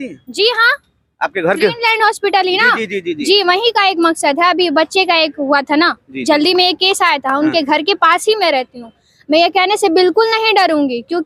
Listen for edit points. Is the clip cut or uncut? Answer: uncut